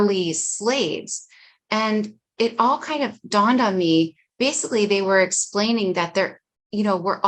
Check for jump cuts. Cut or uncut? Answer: uncut